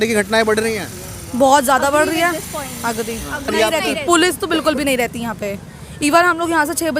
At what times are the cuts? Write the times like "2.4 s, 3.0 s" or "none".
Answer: 3.5 s